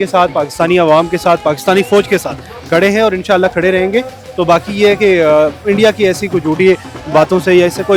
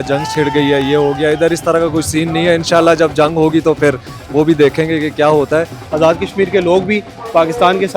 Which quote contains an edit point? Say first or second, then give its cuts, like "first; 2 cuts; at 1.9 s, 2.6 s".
second; 1 cut; at 5.8 s